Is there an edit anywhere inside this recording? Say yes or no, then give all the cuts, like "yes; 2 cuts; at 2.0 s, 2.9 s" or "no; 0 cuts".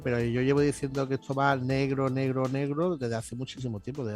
no; 0 cuts